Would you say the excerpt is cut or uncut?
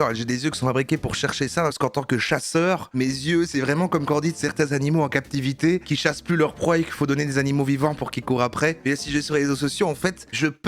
cut